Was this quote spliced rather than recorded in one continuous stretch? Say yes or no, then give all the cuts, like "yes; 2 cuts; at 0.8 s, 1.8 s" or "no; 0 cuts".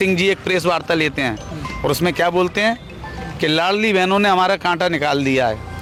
no; 0 cuts